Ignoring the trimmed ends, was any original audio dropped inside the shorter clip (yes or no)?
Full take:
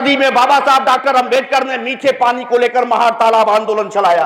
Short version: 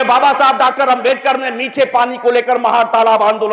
no